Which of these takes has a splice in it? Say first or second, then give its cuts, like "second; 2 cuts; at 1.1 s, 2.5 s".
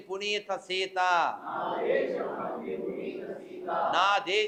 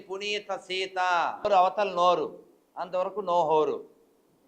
second; 1 cut; at 1.4 s